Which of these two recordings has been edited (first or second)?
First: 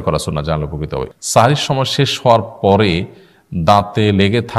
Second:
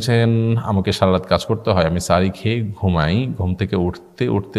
first